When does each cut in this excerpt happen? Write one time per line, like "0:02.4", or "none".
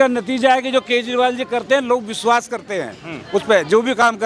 none